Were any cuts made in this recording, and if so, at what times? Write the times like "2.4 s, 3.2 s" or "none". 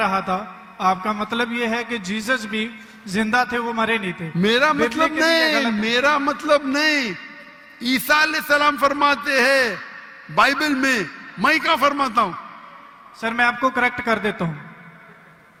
none